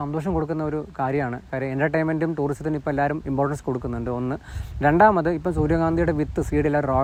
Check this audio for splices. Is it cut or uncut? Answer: uncut